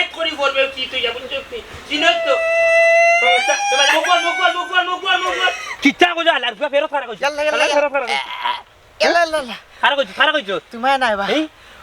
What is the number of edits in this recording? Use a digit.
1